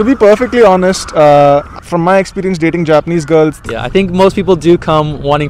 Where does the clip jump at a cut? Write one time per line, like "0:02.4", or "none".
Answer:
0:03.6